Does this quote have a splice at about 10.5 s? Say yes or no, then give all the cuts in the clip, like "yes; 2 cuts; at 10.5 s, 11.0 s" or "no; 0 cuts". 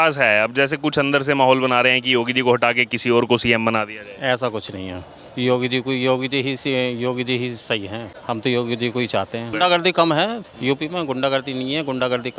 yes; 3 cuts; at 8.1 s, 9.5 s, 10.5 s